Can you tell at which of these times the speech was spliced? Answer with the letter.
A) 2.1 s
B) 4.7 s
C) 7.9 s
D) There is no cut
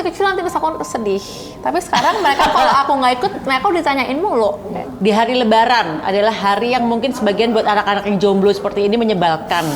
B